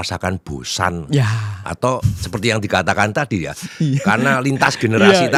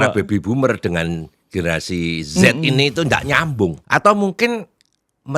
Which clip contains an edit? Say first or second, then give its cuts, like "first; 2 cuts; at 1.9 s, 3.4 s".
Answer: second; 1 cut; at 3.8 s